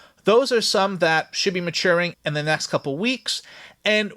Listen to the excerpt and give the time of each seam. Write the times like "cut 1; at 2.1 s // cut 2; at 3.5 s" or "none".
cut 1; at 2.1 s